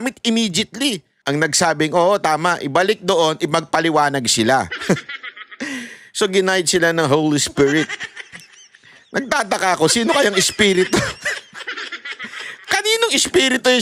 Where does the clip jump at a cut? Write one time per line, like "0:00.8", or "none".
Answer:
0:01.1